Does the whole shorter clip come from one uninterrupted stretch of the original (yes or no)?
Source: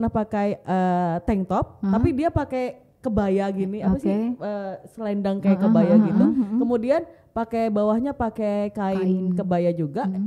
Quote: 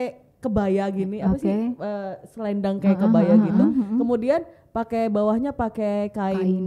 yes